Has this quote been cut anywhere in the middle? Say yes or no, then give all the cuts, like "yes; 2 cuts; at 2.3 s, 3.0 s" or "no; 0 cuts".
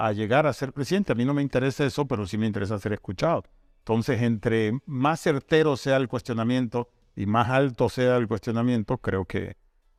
no; 0 cuts